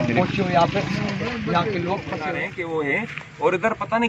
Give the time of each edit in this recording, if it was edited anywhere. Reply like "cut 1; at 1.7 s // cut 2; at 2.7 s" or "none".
cut 1; at 2.4 s